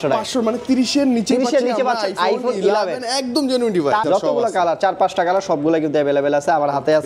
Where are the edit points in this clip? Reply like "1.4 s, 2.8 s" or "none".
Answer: 4.0 s